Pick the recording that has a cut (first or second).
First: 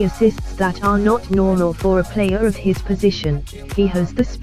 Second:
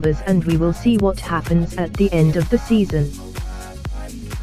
second